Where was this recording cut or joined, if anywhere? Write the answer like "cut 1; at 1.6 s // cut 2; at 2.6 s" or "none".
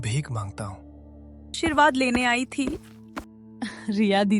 cut 1; at 1.6 s